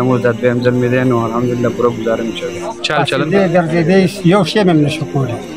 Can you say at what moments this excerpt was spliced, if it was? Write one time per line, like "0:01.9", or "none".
0:03.3